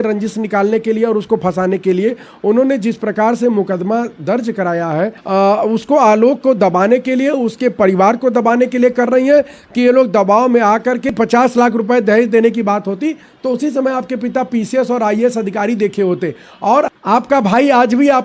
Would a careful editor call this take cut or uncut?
cut